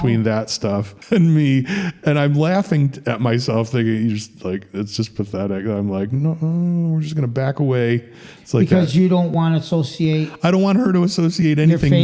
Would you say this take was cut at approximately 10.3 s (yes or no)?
no